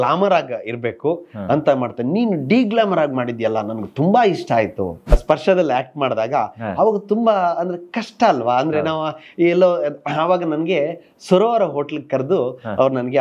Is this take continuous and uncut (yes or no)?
no